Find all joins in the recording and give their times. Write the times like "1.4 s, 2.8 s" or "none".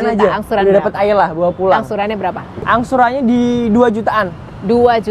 2.6 s